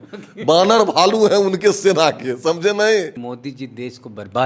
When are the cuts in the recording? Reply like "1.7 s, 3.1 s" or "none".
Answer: 3.2 s